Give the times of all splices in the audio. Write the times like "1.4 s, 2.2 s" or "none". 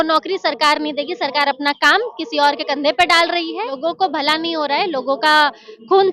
3.8 s